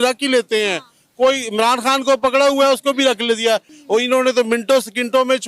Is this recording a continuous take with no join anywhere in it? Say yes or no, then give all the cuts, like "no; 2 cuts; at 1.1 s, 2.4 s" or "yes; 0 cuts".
no; 1 cut; at 3.7 s